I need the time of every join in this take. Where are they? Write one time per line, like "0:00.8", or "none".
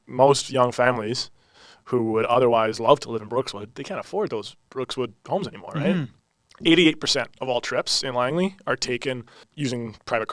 0:06.2
0:09.4